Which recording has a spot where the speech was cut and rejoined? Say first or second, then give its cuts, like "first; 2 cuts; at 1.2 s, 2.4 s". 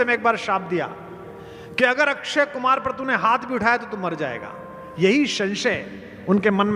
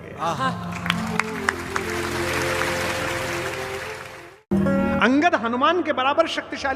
second; 1 cut; at 4.1 s